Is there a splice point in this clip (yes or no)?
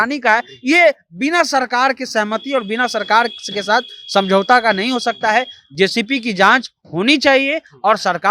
no